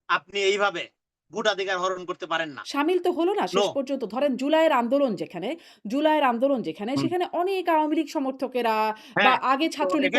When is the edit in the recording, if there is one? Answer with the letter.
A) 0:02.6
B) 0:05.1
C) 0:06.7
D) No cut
A